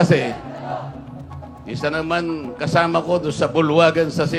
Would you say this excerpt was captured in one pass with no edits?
yes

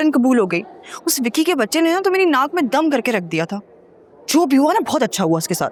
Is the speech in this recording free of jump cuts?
yes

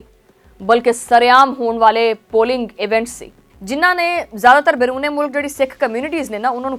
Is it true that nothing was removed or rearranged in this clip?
yes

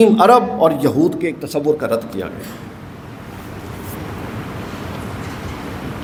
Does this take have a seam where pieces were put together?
no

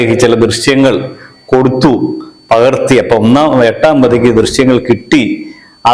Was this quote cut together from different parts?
no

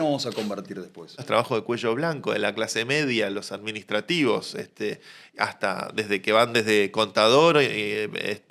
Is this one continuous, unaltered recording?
no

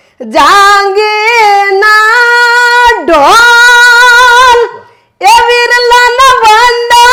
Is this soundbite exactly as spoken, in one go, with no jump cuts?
yes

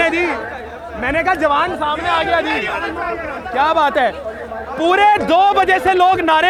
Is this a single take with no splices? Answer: yes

